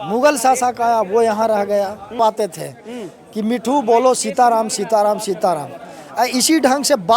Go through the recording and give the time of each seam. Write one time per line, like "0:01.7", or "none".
0:02.1